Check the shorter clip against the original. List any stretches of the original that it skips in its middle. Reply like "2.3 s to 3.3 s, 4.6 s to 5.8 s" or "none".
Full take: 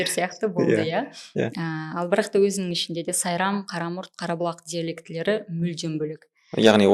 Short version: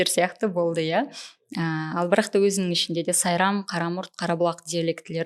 none